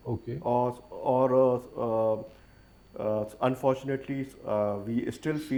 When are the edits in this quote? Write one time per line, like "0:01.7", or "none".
none

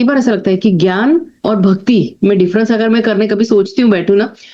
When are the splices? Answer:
0:01.3

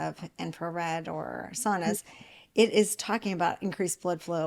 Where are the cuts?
none

